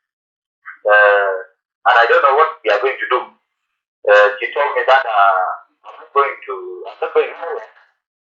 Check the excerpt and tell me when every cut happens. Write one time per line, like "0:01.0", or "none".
none